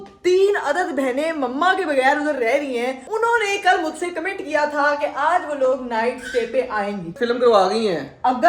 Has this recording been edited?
yes; 2 cuts; at 3.0 s, 7.1 s

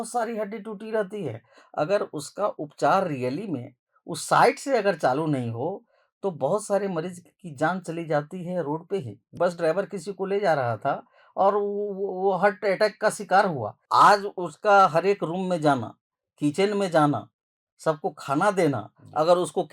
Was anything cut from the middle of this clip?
yes; 2 cuts; at 9.3 s, 13.7 s

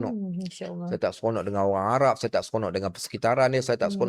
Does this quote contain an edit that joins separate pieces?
no; 0 cuts

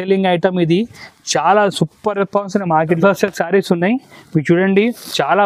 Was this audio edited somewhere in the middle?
yes; 1 cut; at 3.0 s

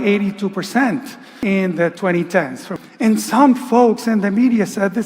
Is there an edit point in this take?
yes; 2 cuts; at 1.3 s, 2.7 s

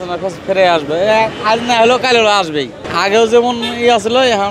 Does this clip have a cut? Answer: yes; 1 cut; at 2.8 s

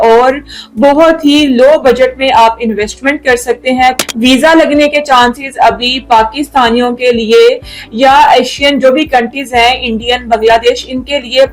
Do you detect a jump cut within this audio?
yes; 1 cut; at 4.0 s

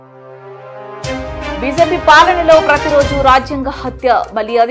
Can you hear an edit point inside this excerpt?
no; 0 cuts

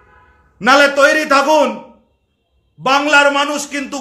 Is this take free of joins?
yes; 0 cuts

